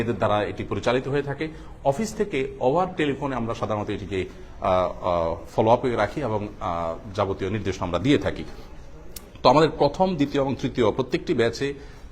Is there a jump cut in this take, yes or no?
no